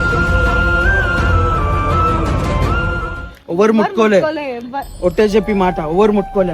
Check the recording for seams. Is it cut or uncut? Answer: cut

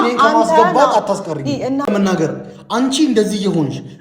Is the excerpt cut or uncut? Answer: cut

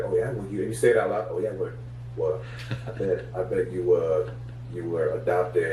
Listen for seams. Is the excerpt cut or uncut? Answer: uncut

